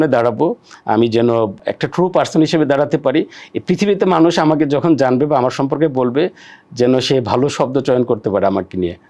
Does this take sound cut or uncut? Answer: cut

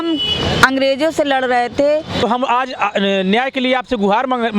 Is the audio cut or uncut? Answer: cut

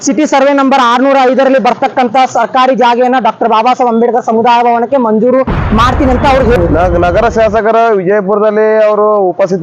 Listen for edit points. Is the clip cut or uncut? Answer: cut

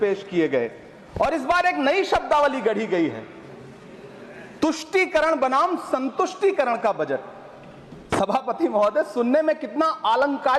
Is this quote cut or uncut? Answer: uncut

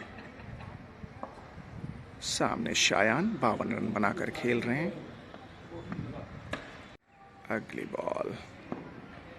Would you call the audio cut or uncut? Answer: cut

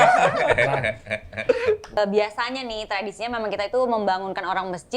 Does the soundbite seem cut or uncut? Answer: cut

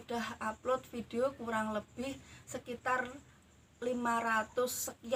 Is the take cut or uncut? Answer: uncut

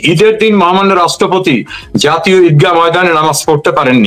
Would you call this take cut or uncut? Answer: uncut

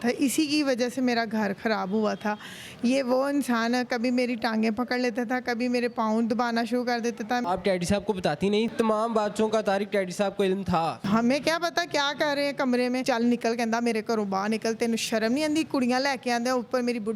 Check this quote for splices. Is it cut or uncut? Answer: cut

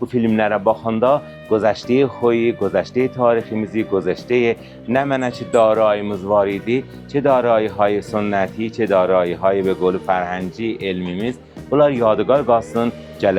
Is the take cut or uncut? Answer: uncut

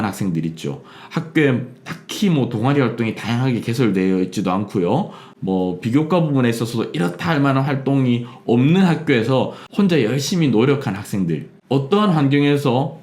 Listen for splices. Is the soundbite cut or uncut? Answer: cut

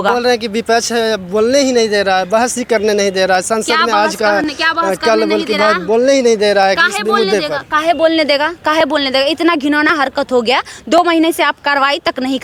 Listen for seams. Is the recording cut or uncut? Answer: uncut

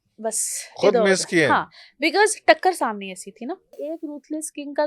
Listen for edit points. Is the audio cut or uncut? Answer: cut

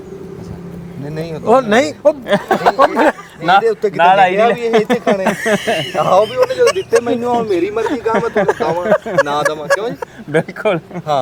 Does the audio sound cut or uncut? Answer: uncut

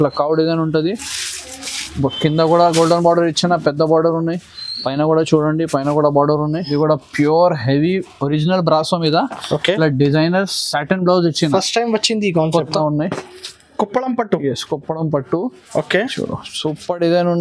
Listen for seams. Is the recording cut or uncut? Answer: cut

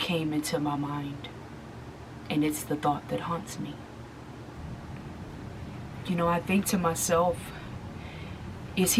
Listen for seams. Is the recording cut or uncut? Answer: cut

